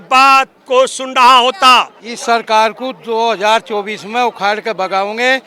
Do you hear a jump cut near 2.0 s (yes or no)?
yes